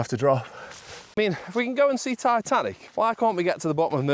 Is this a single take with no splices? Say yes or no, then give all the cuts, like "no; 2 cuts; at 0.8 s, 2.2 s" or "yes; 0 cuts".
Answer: no; 2 cuts; at 1.1 s, 2.8 s